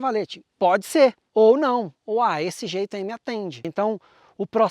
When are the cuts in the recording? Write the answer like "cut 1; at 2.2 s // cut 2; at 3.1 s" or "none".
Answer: cut 1; at 1.2 s // cut 2; at 3.7 s

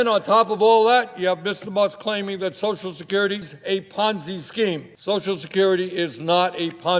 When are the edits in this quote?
cut 1; at 3.5 s // cut 2; at 4.9 s

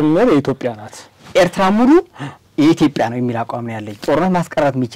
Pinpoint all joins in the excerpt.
cut 1; at 4.0 s

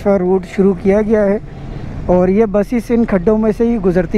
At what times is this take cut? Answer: none

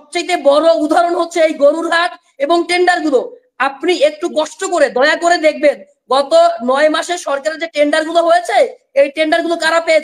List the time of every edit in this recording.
none

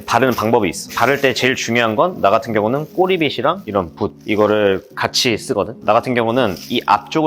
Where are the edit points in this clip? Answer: cut 1; at 0.9 s // cut 2; at 3.8 s // cut 3; at 5.8 s

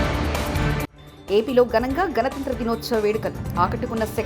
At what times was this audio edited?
cut 1; at 0.9 s

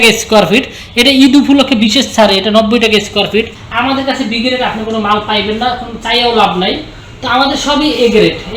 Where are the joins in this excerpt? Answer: cut 1; at 3.6 s

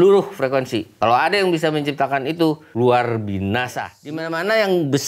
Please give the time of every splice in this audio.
cut 1; at 0.9 s // cut 2; at 2.7 s // cut 3; at 4.0 s

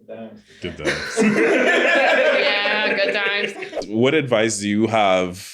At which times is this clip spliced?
cut 1; at 3.7 s

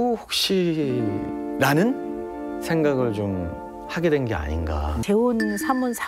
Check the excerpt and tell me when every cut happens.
cut 1; at 5.0 s

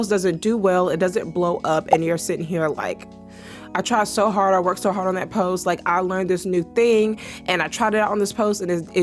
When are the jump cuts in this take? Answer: none

